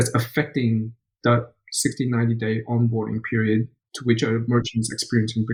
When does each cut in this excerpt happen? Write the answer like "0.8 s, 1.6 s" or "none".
none

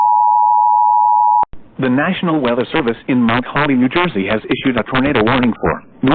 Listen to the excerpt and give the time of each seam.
1.4 s

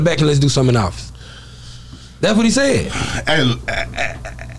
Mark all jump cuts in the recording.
none

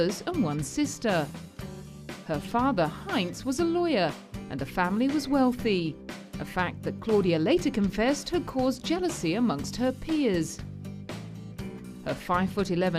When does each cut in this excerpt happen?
3.3 s

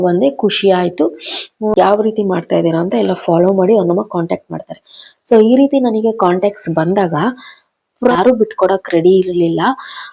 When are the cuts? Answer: 1.7 s, 8.1 s

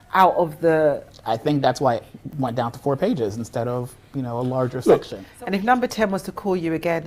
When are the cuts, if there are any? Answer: 5.2 s

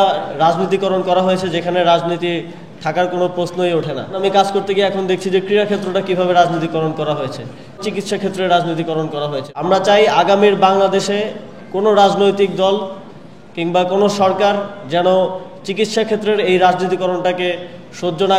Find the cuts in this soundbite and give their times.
4.2 s, 7.8 s, 9.4 s

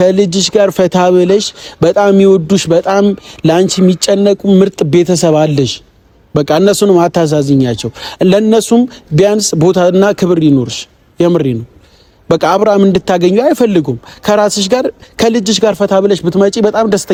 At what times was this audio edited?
none

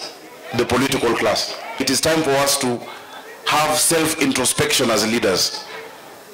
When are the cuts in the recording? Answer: 1.8 s

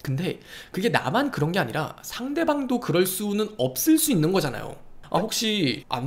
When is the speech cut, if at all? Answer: 4.9 s

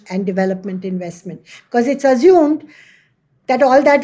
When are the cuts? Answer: none

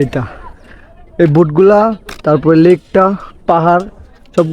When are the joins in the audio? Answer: none

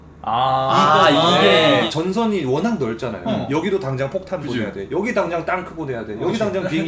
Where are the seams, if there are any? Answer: 1.9 s

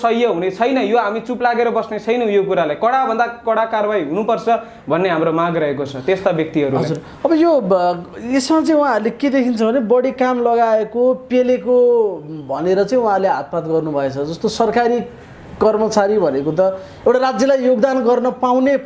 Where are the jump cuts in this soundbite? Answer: none

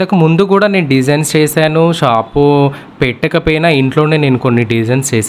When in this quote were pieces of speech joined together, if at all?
none

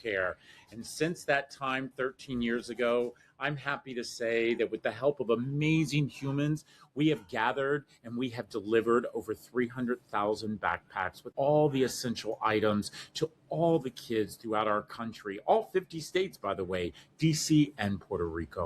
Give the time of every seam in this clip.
11.2 s

